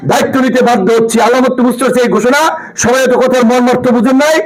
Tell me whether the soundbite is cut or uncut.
uncut